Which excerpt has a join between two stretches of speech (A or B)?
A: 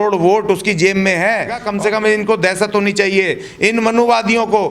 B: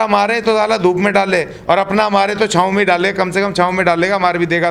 A